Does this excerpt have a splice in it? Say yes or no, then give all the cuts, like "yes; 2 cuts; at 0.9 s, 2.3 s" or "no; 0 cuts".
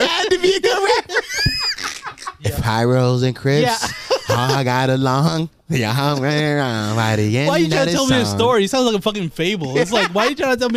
yes; 1 cut; at 2.3 s